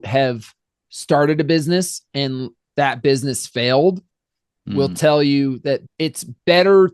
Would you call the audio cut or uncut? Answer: cut